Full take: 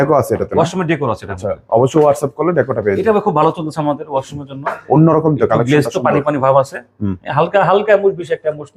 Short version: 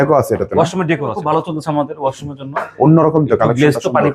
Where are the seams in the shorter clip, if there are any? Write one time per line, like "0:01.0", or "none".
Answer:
0:01.2